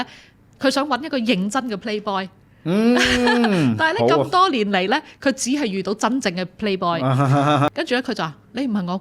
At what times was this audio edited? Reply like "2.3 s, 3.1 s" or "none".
7.7 s